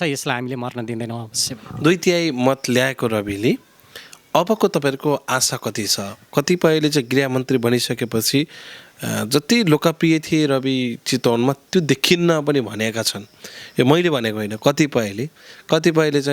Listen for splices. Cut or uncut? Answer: uncut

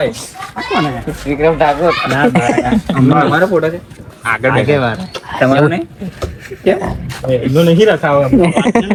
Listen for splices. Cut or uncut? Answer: uncut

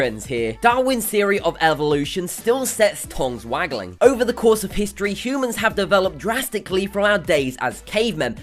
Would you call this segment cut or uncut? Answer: uncut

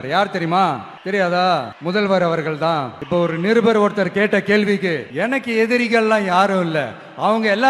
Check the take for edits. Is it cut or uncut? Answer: cut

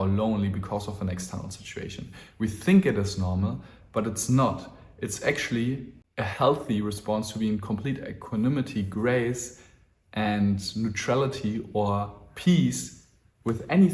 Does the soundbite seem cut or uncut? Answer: cut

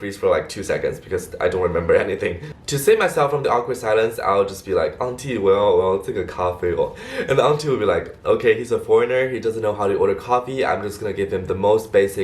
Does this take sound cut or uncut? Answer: uncut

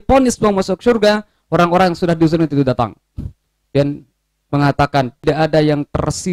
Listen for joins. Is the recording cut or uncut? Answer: cut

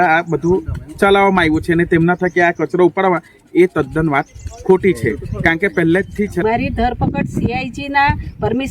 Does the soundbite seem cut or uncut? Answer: cut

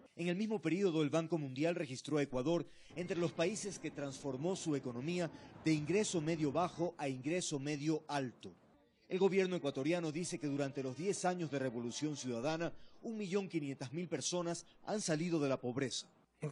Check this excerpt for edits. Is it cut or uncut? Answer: uncut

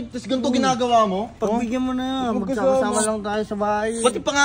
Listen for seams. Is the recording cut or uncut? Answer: cut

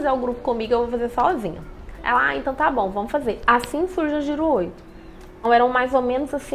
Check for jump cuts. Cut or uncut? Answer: uncut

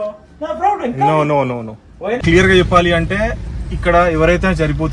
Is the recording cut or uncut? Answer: cut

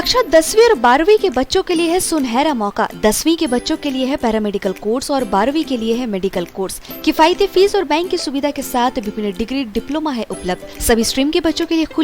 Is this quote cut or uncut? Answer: uncut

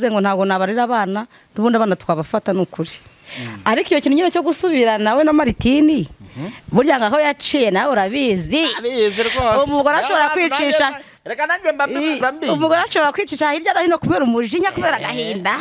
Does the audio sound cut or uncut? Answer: uncut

